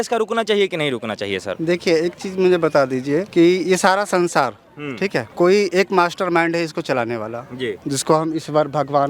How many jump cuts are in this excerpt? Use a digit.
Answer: 3